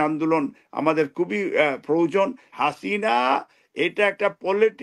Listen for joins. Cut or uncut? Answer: cut